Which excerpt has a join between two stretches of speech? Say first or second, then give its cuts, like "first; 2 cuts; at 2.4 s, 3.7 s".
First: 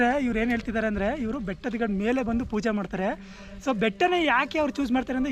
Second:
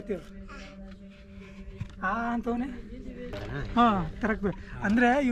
second; 1 cut; at 3.4 s